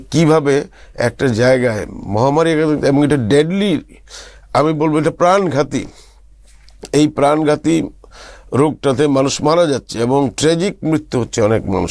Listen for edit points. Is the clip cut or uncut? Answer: uncut